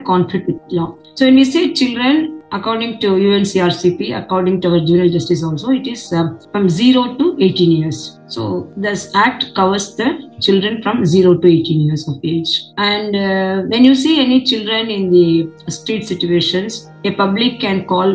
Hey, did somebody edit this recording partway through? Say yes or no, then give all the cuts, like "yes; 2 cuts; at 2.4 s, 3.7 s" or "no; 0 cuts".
no; 0 cuts